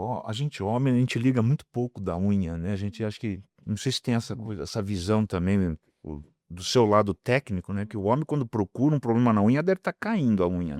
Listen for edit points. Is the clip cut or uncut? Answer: uncut